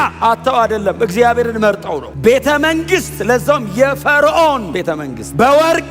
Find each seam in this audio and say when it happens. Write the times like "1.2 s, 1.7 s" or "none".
4.9 s